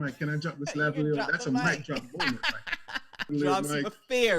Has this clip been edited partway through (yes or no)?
yes